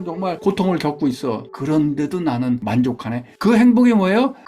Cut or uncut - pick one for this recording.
cut